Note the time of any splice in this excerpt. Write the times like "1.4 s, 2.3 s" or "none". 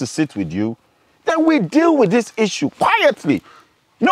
none